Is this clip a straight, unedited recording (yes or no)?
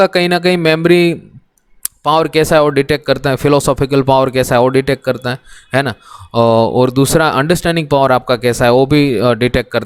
yes